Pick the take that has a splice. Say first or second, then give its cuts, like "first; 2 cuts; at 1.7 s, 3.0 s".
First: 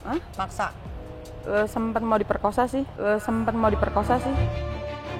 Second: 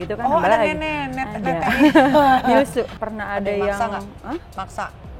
second; 1 cut; at 3.0 s